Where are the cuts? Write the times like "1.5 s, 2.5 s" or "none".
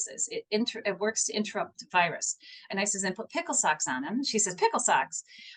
2.7 s